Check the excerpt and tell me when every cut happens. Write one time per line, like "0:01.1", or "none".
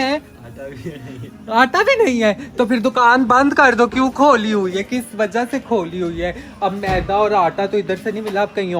none